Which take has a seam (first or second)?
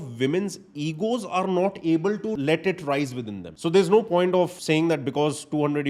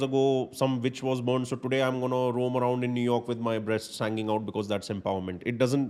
first